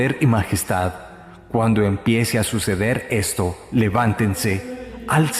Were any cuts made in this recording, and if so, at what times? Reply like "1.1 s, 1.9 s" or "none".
2.0 s